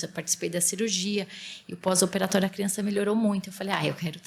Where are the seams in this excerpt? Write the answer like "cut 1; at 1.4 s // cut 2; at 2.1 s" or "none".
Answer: none